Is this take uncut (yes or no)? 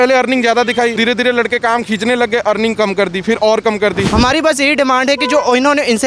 no